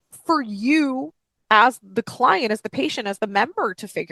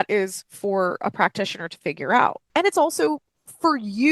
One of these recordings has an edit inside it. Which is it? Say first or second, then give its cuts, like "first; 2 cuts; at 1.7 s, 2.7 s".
second; 1 cut; at 2.4 s